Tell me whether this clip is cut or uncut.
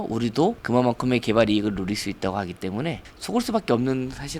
uncut